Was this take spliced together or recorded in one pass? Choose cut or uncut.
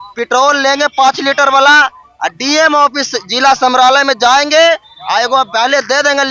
uncut